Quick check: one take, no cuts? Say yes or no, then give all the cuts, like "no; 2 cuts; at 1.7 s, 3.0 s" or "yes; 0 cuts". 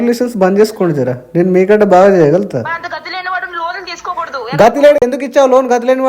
no; 1 cut; at 5.0 s